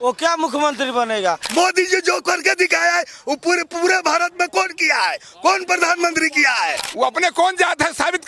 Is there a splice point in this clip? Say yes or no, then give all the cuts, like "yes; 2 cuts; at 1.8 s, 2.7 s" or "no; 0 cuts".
yes; 2 cuts; at 1.4 s, 6.8 s